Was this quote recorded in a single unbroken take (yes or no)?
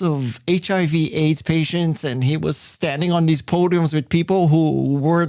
yes